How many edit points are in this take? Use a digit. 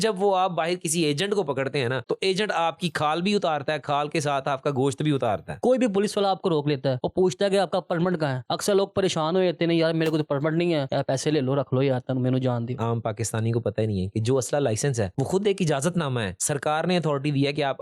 4